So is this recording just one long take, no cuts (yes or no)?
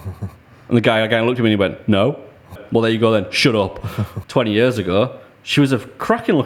no